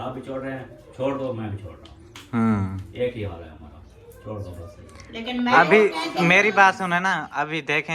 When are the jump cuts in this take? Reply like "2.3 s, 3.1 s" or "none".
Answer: none